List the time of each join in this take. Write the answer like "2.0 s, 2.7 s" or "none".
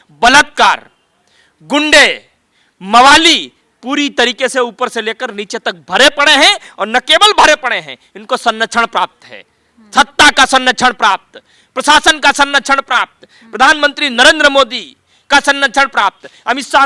none